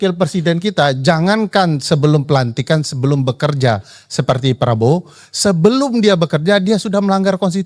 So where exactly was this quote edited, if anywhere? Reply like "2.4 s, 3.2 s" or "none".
none